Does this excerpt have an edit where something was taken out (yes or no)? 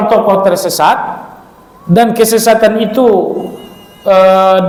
no